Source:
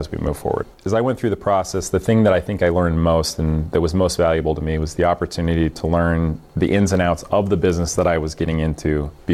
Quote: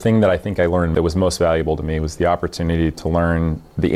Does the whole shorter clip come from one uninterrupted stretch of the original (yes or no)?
no